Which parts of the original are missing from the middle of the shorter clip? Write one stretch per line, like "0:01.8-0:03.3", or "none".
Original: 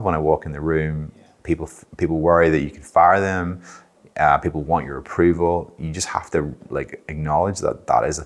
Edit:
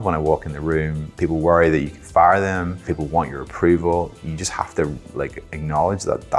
0:01.0-0:01.8
0:03.7-0:04.5